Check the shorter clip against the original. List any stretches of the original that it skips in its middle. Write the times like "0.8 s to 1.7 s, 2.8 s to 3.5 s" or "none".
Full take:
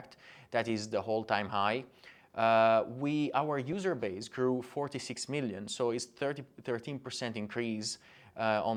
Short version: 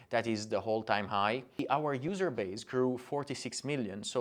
2.0 s to 3.3 s